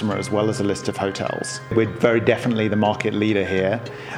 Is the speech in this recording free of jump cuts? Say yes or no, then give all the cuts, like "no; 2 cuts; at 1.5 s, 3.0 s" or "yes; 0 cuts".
no; 1 cut; at 1.7 s